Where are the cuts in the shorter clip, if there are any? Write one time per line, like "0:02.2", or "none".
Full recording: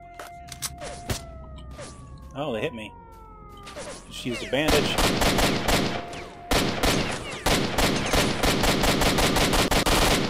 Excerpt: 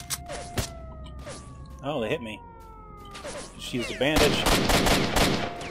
none